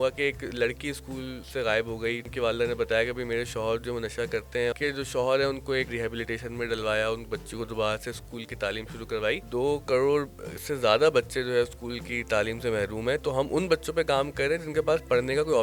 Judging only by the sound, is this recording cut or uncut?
cut